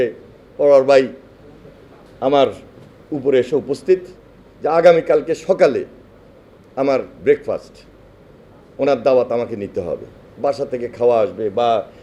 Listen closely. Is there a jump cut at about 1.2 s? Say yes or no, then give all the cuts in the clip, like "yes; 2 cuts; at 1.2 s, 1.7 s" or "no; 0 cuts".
no; 0 cuts